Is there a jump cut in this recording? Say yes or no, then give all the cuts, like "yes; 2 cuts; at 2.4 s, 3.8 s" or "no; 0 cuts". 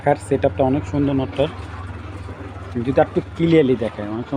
no; 0 cuts